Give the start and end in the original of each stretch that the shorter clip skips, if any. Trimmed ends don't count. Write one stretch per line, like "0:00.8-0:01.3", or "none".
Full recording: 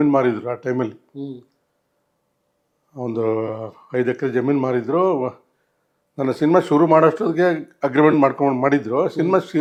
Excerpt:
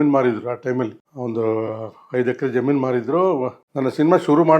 0:01.0-0:02.8
0:05.4-0:06.0